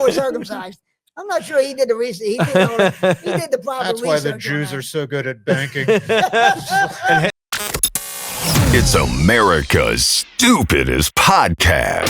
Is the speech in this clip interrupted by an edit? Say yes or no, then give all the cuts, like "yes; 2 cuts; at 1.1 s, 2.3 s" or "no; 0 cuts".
yes; 1 cut; at 7.4 s